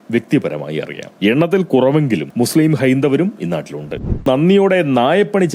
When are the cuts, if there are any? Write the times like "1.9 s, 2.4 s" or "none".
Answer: 1.0 s, 4.2 s